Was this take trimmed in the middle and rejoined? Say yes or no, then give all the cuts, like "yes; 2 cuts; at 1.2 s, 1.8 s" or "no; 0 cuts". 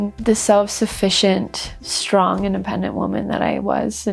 no; 0 cuts